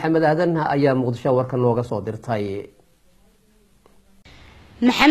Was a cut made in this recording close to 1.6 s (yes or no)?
no